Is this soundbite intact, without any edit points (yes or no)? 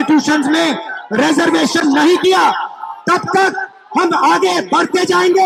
yes